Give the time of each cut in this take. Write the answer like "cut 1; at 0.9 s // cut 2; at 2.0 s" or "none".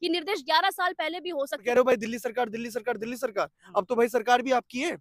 cut 1; at 1.6 s